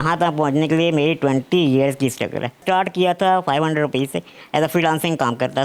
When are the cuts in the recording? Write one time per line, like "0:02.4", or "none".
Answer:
0:02.6